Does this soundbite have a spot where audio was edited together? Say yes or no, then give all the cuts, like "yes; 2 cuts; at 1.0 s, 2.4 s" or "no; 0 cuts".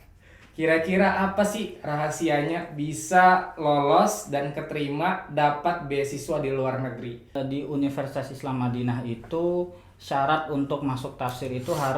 yes; 1 cut; at 7.4 s